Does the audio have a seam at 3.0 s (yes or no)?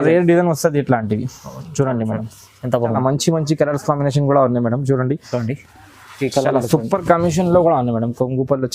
yes